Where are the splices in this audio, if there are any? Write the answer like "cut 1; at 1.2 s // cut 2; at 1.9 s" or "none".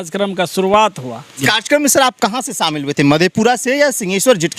cut 1; at 1.4 s